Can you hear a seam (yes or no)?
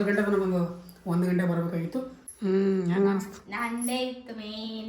yes